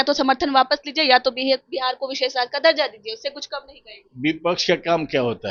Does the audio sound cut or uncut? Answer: uncut